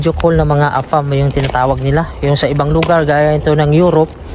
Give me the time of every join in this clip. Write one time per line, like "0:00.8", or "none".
none

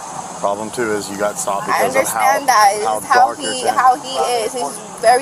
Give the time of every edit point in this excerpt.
none

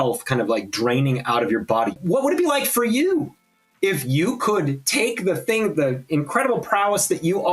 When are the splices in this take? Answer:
0:02.0

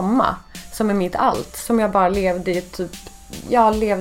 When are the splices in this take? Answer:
none

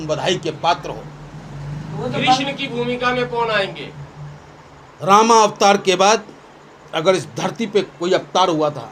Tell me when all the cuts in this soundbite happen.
none

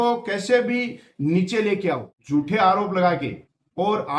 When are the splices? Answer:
0:02.1

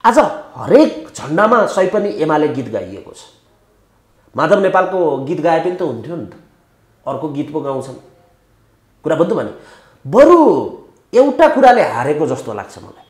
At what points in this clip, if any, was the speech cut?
none

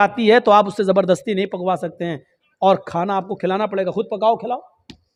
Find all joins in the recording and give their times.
none

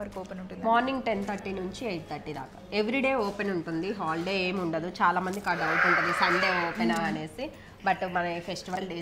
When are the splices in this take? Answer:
none

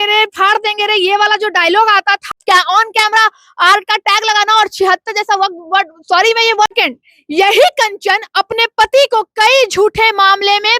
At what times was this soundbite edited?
0:02.3
0:06.7

